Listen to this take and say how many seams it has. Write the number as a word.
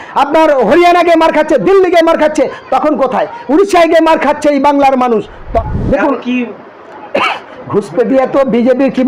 one